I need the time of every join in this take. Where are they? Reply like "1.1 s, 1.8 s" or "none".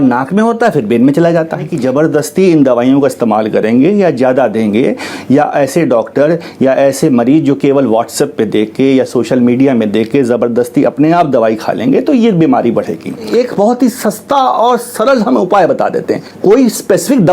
1.7 s, 13.3 s, 16.2 s